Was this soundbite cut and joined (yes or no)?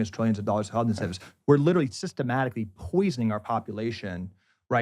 no